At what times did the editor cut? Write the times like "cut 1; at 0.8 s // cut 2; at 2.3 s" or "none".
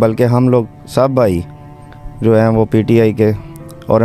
none